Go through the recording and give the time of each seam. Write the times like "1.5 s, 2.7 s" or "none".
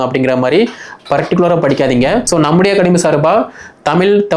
2.3 s